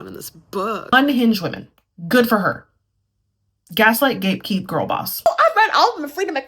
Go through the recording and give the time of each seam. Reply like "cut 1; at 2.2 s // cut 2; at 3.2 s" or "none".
cut 1; at 0.9 s // cut 2; at 5.2 s